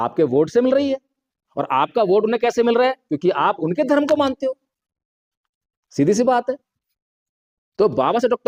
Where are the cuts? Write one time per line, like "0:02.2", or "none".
none